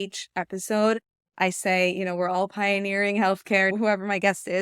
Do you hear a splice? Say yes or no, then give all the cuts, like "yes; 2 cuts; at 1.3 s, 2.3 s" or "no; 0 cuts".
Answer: yes; 1 cut; at 3.7 s